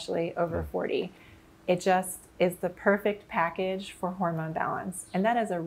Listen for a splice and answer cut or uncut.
cut